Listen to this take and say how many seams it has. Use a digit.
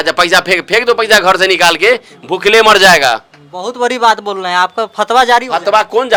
0